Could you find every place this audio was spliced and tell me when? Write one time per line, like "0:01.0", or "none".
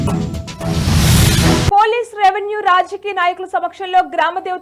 0:01.3